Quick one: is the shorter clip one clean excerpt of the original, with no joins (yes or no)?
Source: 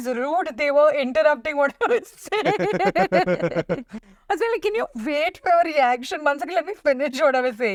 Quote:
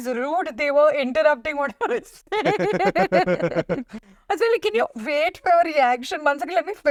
yes